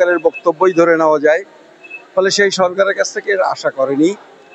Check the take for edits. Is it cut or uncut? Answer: uncut